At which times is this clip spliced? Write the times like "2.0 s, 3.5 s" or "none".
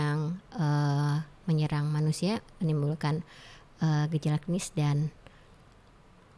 none